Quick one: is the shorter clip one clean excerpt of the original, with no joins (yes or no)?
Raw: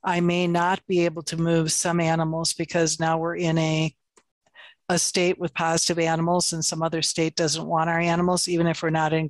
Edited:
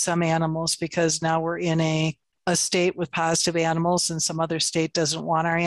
no